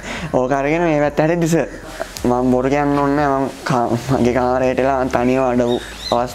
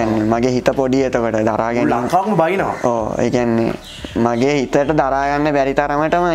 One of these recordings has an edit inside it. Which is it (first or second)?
first